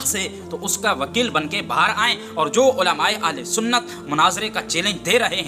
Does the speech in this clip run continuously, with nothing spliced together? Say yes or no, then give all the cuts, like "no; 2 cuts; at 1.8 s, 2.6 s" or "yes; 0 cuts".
yes; 0 cuts